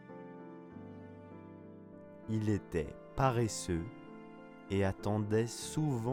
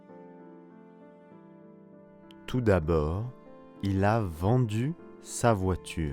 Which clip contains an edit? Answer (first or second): second